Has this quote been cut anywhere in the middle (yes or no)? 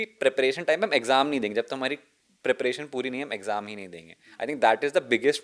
no